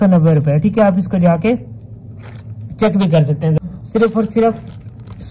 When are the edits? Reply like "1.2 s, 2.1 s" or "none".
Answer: 3.6 s